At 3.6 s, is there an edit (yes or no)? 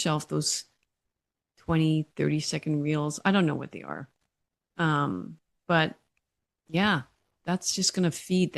no